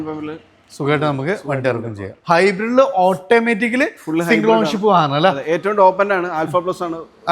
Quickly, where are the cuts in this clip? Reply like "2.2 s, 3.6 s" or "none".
2.1 s

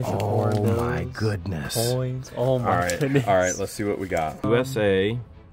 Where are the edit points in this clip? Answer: 4.4 s

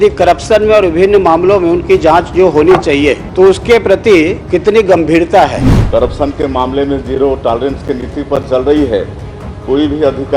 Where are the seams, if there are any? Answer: 3.2 s, 4.4 s, 5.7 s

